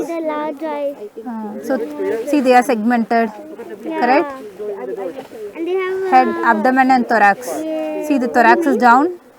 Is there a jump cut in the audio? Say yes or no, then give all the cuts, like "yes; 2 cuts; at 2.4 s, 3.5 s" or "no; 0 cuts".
no; 0 cuts